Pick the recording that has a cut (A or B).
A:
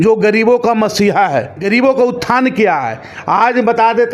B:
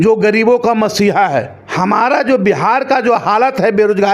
B